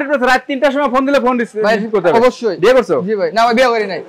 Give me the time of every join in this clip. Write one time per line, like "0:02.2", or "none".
none